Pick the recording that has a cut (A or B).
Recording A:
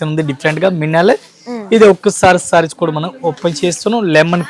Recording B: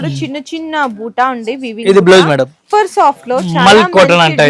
B